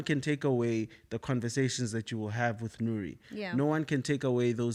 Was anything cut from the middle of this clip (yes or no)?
no